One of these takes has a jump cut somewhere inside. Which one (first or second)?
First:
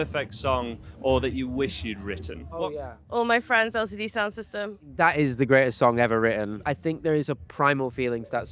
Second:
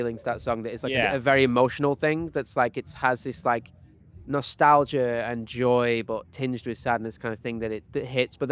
first